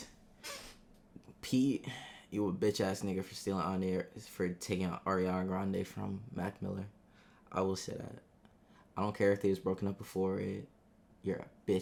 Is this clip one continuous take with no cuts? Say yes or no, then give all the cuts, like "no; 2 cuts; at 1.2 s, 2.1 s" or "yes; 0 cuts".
yes; 0 cuts